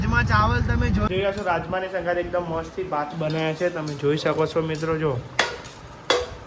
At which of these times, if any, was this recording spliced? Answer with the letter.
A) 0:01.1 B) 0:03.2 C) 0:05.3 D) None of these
A